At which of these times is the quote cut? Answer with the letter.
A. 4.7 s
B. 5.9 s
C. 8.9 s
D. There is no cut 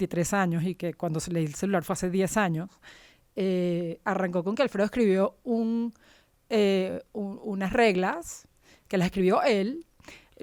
D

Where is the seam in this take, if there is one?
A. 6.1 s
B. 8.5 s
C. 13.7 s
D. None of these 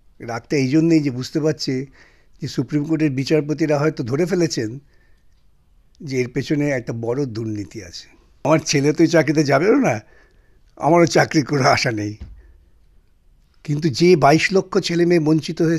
B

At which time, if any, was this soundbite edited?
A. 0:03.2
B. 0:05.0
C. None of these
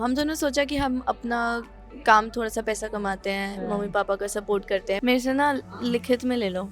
B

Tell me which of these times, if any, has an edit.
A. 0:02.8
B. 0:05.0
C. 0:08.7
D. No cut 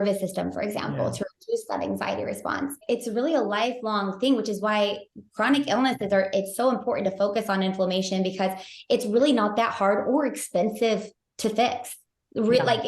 A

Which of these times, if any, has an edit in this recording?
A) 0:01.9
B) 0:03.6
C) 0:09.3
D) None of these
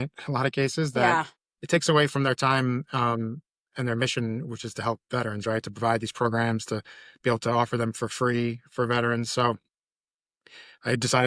D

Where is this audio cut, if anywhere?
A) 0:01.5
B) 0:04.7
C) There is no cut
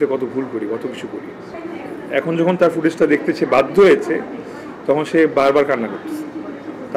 A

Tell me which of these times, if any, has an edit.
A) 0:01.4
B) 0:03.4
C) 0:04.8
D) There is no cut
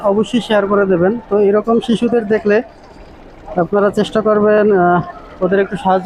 D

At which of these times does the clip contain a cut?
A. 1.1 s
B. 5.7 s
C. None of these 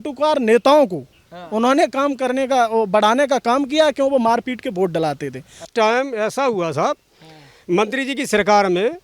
B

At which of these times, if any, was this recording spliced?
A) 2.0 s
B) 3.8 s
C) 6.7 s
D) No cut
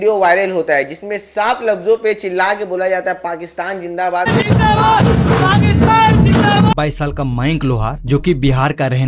C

